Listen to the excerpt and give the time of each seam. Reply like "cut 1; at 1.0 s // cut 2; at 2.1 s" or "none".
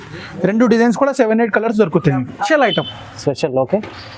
cut 1; at 2.5 s